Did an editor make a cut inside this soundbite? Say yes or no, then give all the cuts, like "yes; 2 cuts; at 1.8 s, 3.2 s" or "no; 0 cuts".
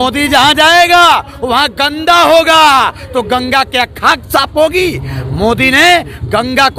no; 0 cuts